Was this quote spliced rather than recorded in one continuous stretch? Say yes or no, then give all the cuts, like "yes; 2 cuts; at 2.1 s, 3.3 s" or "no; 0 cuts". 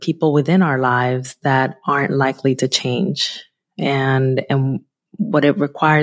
no; 0 cuts